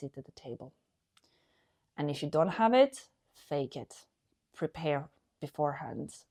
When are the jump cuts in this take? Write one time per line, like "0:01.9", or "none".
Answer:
none